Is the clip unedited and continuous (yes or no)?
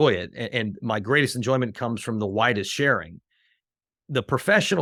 yes